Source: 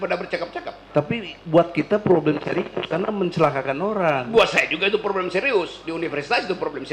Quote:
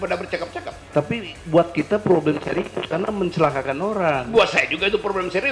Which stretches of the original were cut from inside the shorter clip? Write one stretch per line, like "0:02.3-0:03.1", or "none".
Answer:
none